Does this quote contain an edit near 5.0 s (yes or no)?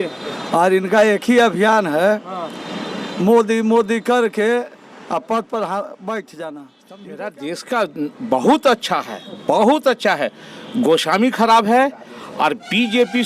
no